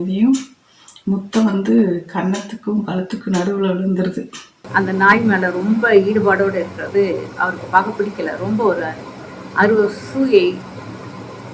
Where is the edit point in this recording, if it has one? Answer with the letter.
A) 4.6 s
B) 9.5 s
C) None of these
A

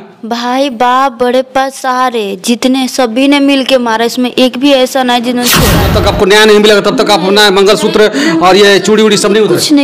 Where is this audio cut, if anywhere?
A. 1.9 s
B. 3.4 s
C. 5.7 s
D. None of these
C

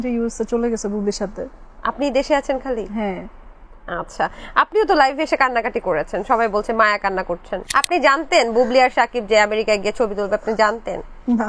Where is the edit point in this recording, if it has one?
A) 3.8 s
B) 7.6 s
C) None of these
B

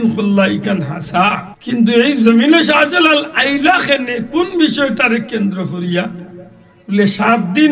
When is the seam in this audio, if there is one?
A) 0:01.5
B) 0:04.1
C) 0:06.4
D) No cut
A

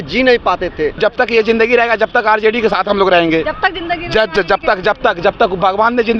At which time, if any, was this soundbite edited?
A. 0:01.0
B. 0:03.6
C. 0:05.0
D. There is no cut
A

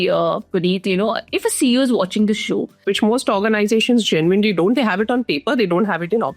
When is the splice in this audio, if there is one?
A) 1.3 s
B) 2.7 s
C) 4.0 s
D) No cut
B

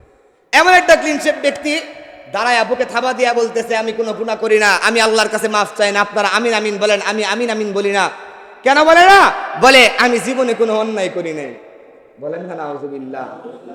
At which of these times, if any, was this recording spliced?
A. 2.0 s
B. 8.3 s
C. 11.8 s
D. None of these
D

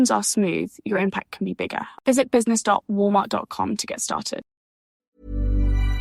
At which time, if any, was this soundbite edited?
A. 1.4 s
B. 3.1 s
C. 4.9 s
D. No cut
C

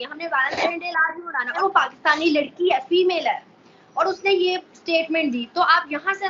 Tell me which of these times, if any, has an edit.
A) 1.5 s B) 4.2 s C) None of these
A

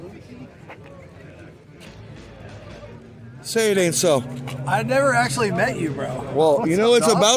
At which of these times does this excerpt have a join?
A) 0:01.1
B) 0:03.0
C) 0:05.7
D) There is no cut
D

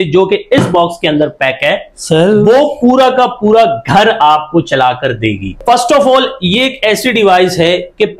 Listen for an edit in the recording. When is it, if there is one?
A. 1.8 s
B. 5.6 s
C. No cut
B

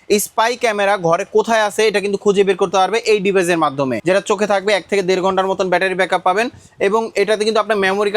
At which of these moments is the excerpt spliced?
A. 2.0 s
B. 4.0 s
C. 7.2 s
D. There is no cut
B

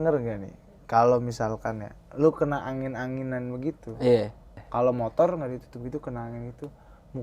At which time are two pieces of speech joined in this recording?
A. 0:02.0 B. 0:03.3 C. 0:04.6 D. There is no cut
C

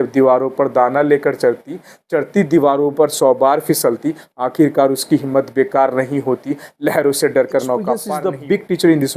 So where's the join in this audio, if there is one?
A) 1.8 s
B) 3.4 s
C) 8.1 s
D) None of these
C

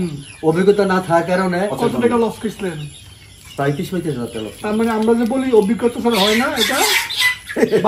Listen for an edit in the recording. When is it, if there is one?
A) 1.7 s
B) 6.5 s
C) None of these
A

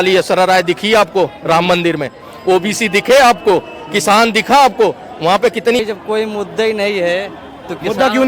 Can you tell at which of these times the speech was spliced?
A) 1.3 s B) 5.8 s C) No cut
B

